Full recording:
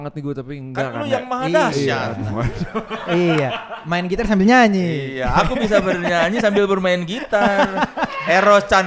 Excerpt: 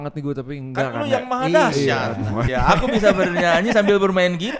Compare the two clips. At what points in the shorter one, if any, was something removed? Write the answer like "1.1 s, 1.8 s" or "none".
2.5 s